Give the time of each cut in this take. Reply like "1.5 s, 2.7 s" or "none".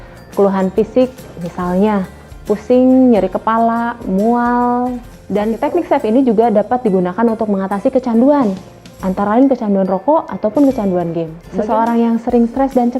5.1 s, 11.4 s